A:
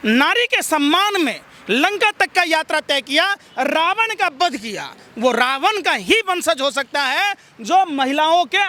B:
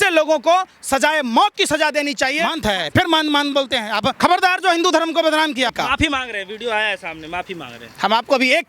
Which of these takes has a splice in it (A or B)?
B